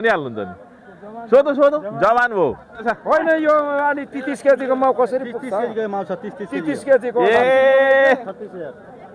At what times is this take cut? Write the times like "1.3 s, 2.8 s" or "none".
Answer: 2.9 s